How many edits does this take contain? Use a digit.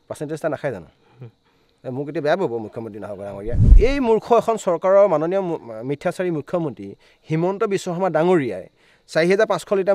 1